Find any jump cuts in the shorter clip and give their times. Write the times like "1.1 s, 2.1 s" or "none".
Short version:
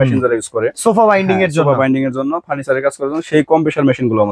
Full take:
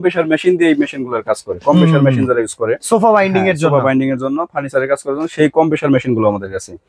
none